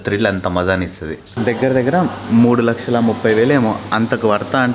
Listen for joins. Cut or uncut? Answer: cut